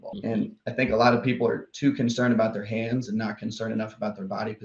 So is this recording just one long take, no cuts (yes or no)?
yes